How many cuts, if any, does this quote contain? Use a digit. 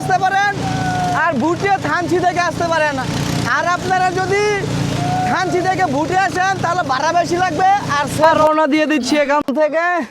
1